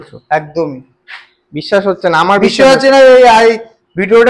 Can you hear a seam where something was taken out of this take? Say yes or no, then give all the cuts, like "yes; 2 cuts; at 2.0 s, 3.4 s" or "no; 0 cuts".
no; 0 cuts